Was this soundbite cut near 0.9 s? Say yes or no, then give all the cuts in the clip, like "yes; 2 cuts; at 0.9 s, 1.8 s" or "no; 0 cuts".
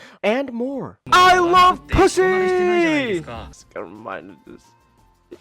yes; 1 cut; at 0.9 s